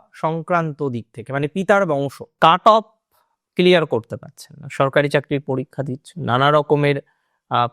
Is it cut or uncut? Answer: cut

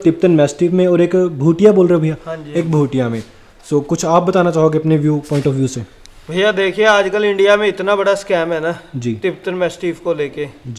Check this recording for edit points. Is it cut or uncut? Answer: uncut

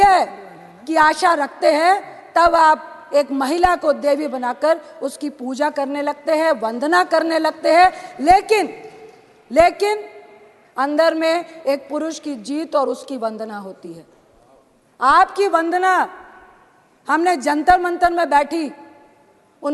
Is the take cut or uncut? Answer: uncut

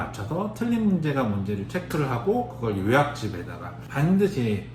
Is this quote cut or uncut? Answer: uncut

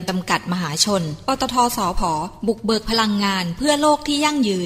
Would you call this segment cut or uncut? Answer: uncut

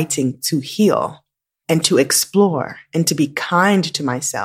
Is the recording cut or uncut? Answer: uncut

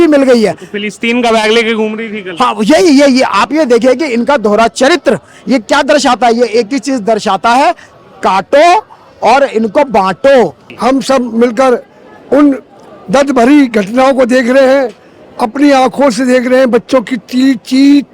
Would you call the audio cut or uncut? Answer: cut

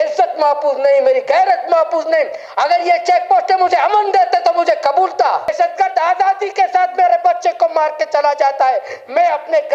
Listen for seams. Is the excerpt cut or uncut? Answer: cut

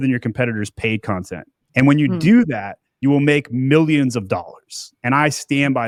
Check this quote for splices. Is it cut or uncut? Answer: uncut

